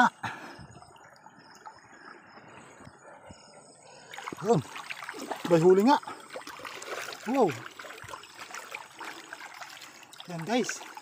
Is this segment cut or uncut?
cut